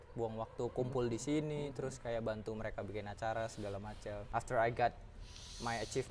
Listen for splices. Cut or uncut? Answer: cut